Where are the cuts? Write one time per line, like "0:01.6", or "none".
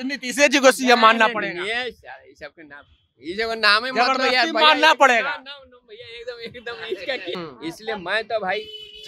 0:07.4